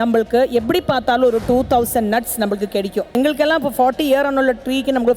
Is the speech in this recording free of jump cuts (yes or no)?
no